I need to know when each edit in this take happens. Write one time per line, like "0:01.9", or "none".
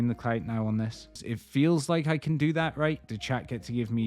0:01.3
0:03.1